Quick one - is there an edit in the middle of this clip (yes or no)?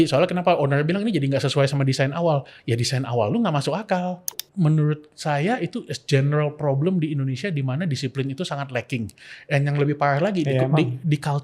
yes